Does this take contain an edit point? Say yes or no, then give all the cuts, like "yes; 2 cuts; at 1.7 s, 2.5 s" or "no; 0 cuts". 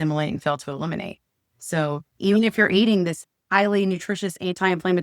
yes; 2 cuts; at 2.1 s, 3.3 s